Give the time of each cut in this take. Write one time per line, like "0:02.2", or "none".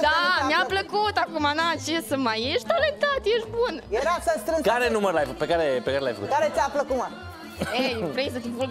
none